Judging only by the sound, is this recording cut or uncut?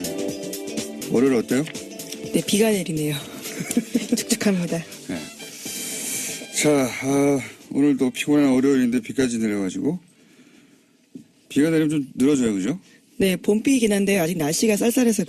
cut